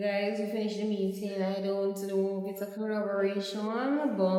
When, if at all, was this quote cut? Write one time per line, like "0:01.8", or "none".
none